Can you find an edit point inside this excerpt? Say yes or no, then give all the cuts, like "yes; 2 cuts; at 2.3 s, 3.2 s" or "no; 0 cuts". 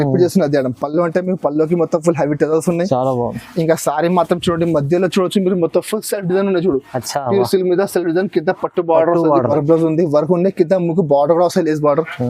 yes; 1 cut; at 9.5 s